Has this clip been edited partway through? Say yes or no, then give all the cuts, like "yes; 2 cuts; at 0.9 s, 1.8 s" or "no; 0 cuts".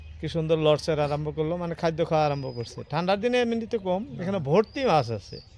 no; 0 cuts